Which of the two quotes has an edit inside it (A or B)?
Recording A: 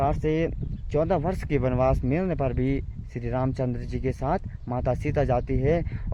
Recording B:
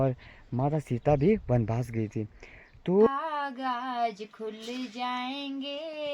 B